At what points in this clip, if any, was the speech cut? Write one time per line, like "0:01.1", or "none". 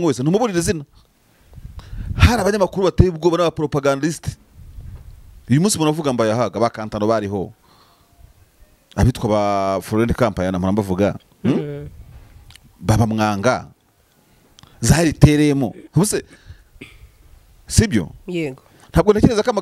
none